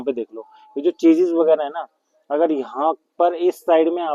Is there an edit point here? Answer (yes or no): no